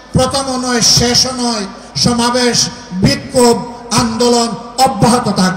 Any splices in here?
no; 0 cuts

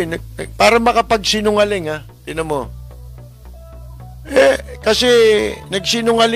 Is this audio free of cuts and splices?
yes; 0 cuts

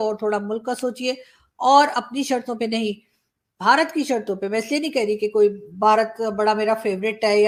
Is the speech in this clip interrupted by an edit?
no; 0 cuts

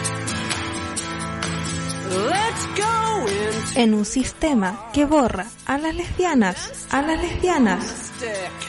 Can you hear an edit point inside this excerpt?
yes; 1 cut; at 0.9 s

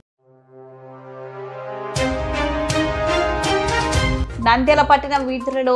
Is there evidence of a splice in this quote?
yes; 1 cut; at 4.2 s

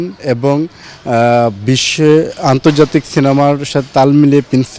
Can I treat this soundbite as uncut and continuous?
yes; 0 cuts

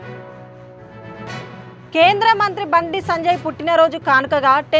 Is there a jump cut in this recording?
yes; 1 cut; at 1.3 s

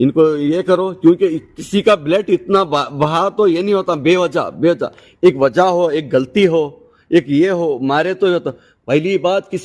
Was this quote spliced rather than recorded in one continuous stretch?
no; 0 cuts

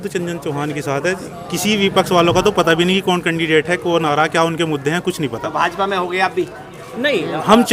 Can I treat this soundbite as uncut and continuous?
yes; 0 cuts

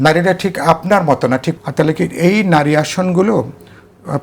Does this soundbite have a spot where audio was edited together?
yes; 1 cut; at 1.5 s

